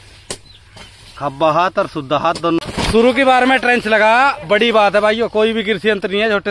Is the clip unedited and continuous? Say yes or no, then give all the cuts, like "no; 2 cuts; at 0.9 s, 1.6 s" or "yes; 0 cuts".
no; 1 cut; at 2.6 s